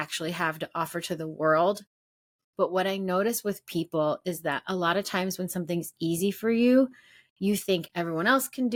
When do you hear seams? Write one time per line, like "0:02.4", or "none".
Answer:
none